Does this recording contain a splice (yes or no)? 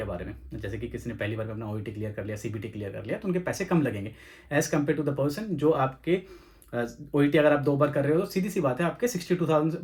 no